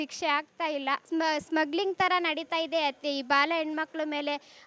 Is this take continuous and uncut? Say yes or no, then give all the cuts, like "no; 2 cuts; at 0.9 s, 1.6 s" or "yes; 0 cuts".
no; 1 cut; at 1.0 s